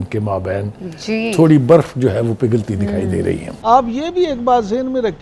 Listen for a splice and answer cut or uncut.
cut